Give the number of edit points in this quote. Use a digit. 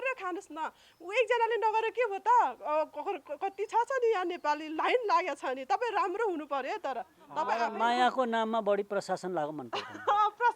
1